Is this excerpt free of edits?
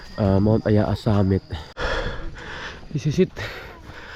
no; 1 cut; at 1.7 s

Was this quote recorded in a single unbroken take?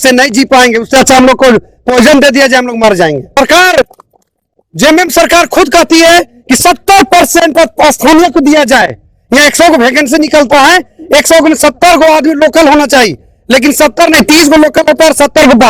yes; 0 cuts

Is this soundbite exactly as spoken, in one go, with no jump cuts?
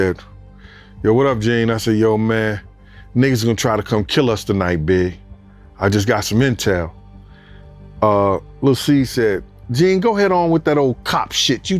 yes; 0 cuts

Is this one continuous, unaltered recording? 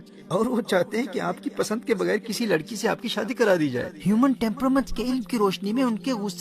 no; 1 cut; at 3.9 s

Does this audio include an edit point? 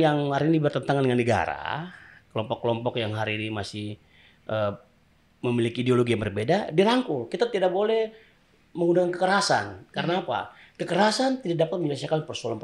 no; 0 cuts

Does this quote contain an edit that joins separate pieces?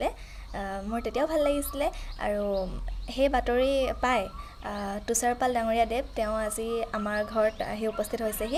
no; 0 cuts

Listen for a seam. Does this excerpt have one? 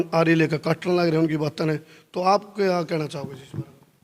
no; 0 cuts

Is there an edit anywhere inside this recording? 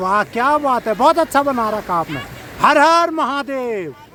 no; 0 cuts

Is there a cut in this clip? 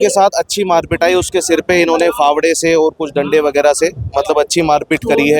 no; 0 cuts

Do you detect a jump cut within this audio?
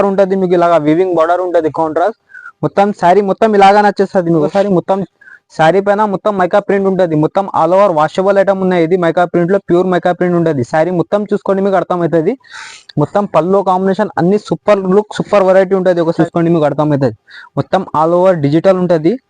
yes; 2 cuts; at 4.5 s, 16.2 s

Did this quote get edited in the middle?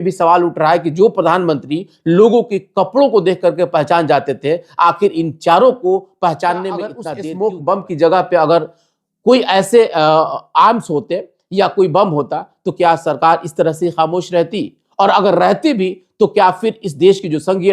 yes; 1 cut; at 7.1 s

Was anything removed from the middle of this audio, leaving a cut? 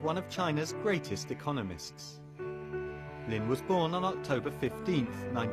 yes; 1 cut; at 3.6 s

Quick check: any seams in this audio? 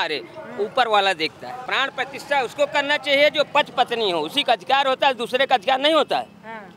yes; 1 cut; at 1.5 s

